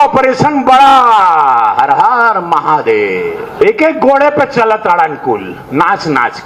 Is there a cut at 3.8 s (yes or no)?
yes